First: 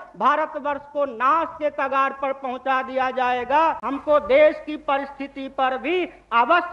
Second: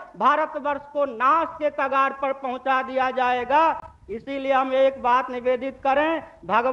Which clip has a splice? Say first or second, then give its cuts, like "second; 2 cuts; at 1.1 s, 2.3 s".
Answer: first; 1 cut; at 3.9 s